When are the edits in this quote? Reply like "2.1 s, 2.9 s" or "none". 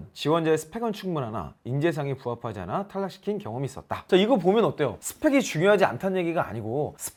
none